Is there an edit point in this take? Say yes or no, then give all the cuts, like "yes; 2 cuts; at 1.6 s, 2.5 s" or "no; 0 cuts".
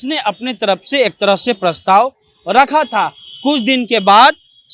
no; 0 cuts